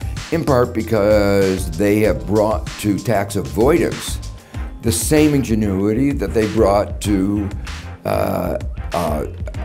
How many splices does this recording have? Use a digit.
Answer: 0